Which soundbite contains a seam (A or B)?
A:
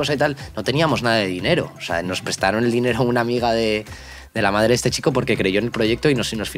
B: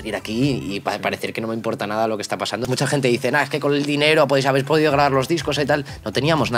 B